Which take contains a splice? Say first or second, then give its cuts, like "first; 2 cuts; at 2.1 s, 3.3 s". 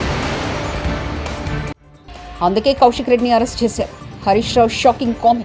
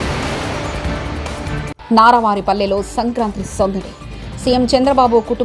first; 1 cut; at 1.7 s